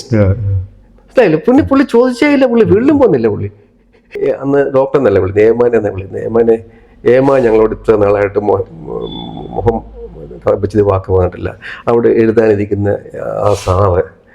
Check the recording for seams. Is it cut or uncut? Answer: cut